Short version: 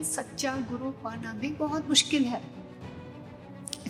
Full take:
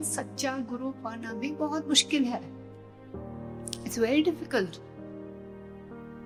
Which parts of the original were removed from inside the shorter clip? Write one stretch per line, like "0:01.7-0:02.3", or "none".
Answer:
none